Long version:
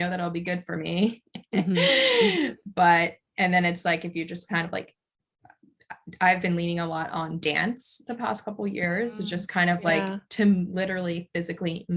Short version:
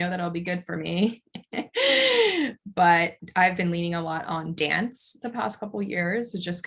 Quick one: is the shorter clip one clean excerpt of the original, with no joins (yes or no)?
no